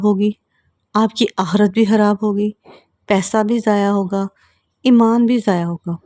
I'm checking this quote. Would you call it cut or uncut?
uncut